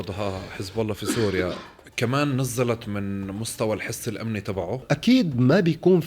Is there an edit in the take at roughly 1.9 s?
no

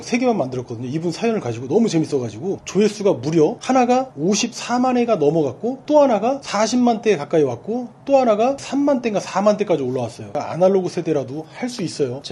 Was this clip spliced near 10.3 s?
yes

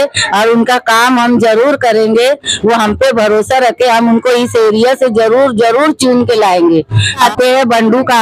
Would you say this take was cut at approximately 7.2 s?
yes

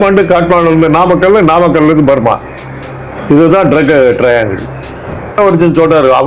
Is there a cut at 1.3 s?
no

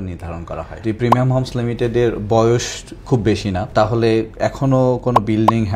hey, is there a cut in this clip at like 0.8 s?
yes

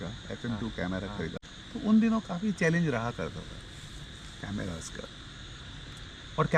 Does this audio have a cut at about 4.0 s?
no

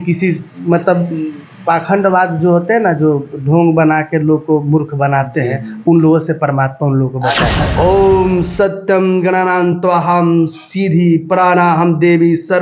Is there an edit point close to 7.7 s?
yes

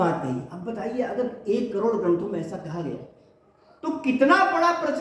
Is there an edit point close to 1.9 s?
no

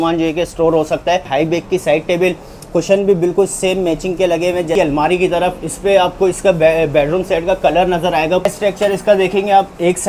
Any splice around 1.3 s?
yes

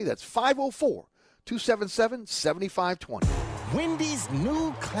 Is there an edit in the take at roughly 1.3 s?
no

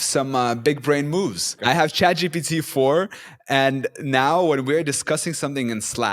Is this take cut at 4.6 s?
no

